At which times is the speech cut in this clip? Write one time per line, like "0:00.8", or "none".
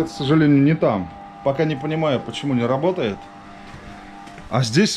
none